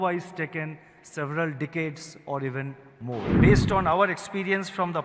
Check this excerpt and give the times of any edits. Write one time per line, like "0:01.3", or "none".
0:03.3